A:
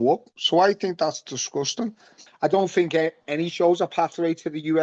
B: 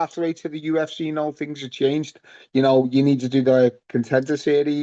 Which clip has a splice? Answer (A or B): A